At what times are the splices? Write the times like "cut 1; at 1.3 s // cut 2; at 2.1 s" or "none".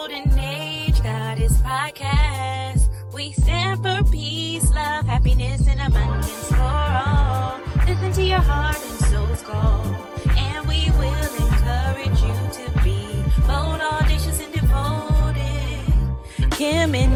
none